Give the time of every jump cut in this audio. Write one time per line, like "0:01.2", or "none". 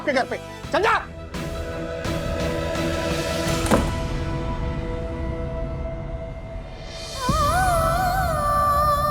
none